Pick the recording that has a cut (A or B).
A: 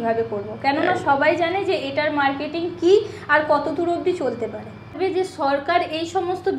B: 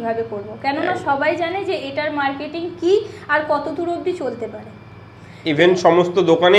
A